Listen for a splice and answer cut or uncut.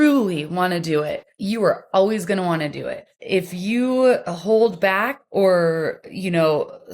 cut